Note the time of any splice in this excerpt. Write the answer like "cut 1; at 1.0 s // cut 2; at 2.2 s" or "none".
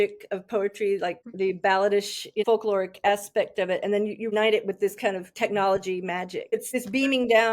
cut 1; at 1.2 s // cut 2; at 2.4 s // cut 3; at 4.3 s // cut 4; at 6.7 s